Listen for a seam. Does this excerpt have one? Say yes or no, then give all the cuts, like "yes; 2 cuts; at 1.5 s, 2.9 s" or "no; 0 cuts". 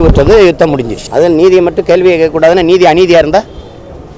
yes; 1 cut; at 1.0 s